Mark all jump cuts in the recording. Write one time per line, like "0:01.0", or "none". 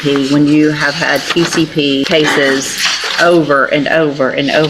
0:02.1